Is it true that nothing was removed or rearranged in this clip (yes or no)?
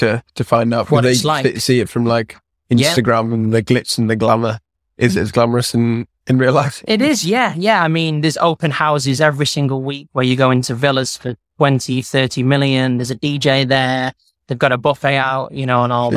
yes